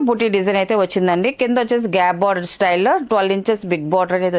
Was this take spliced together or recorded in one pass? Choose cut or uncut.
uncut